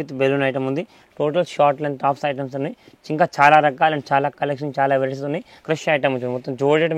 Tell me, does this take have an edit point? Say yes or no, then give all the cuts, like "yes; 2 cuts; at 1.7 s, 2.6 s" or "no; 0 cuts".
yes; 2 cuts; at 1.0 s, 5.5 s